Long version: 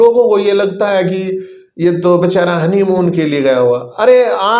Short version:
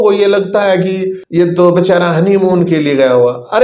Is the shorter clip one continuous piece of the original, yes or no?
no